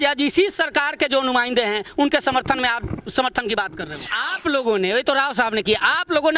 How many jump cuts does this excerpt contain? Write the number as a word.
one